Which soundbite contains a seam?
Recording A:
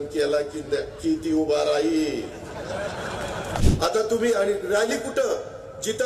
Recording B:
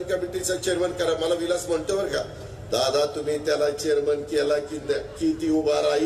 A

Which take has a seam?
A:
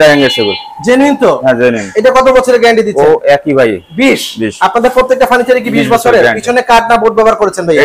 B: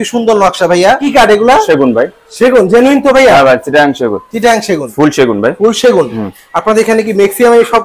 B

